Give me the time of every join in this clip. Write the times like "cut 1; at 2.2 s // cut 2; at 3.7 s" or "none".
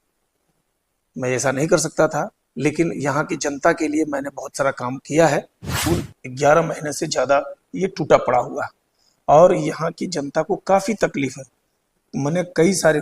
cut 1; at 5.7 s